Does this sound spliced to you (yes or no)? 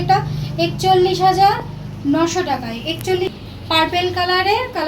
yes